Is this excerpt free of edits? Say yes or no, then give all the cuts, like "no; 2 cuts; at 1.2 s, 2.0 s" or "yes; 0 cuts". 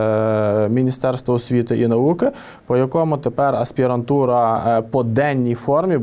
yes; 0 cuts